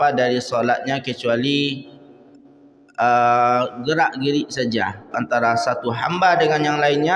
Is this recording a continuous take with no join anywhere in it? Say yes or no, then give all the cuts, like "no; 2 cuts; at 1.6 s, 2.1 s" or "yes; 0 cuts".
no; 1 cut; at 5.1 s